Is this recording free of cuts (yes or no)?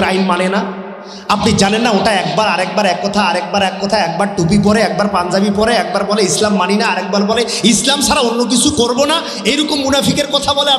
yes